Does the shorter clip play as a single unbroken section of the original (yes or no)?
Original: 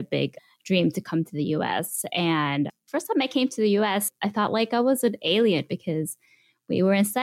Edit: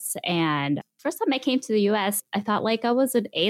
yes